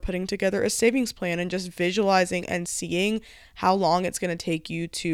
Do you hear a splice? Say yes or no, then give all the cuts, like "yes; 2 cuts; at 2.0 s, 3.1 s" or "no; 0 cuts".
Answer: no; 0 cuts